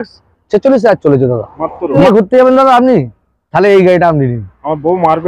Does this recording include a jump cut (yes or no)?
yes